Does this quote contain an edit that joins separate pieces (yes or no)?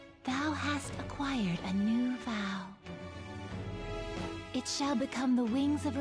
no